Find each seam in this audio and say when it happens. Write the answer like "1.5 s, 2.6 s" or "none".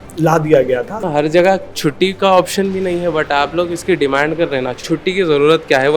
1.0 s, 4.8 s